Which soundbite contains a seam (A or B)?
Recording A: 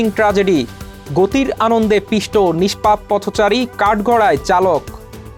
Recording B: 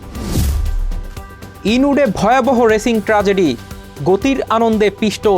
B